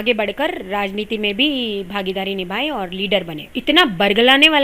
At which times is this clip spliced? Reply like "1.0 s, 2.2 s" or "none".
3.4 s